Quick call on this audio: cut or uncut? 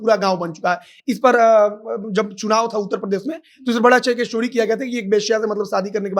uncut